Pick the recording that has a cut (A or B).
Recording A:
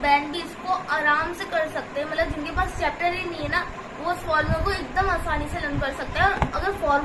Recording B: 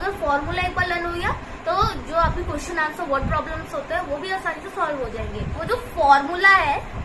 B